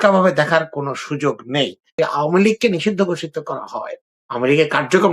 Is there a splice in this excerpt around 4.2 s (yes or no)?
no